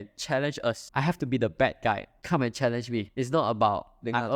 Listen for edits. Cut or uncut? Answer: cut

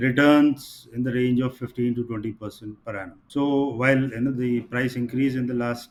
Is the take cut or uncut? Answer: uncut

